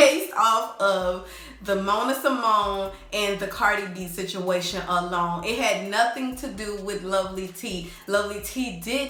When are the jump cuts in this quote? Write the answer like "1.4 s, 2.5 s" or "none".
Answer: none